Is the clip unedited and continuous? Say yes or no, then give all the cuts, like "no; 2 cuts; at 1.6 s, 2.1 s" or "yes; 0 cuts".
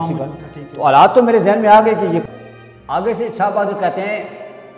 no; 1 cut; at 2.2 s